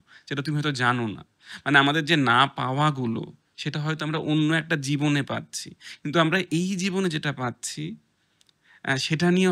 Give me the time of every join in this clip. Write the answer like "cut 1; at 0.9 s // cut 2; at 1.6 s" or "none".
none